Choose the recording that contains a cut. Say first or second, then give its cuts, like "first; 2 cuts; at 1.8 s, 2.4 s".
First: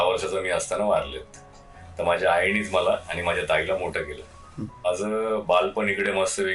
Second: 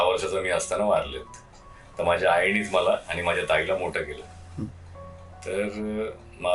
first; 1 cut; at 4.8 s